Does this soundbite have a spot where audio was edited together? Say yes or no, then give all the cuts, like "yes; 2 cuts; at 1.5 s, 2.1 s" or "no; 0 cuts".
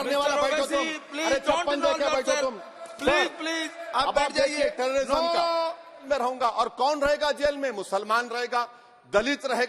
yes; 1 cut; at 6.0 s